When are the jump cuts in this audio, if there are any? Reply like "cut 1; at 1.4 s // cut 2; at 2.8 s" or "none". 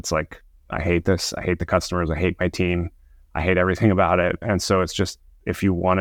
none